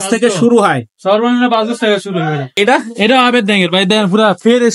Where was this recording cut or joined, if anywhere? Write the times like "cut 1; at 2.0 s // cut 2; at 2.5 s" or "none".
cut 1; at 2.5 s